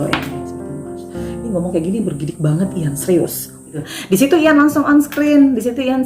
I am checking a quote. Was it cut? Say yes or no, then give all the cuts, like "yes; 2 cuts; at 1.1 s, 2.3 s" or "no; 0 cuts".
yes; 1 cut; at 3.9 s